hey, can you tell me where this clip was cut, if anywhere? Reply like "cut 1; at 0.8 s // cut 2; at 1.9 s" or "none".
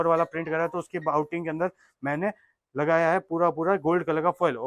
none